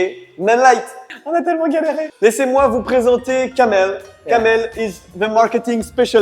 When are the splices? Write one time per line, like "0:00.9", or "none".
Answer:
0:02.1